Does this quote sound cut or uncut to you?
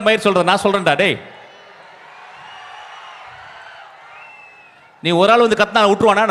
uncut